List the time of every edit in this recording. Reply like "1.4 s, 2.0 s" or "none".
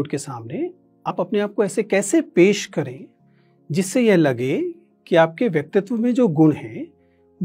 1.1 s